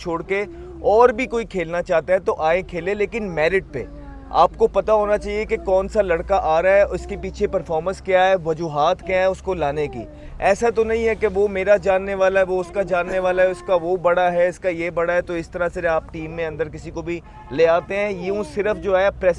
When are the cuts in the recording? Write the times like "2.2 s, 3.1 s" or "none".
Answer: none